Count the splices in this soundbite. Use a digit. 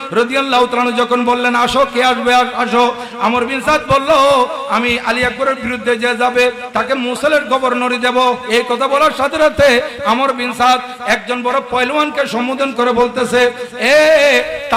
0